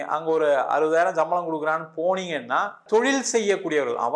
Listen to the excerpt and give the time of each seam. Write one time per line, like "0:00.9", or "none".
0:02.8

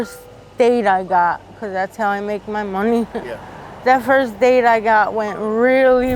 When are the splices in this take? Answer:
none

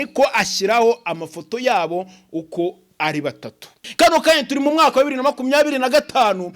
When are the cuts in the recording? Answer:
0:03.8

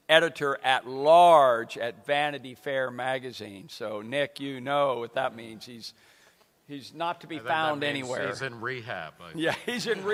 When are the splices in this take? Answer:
none

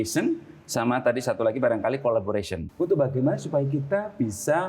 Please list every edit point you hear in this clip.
0:02.6

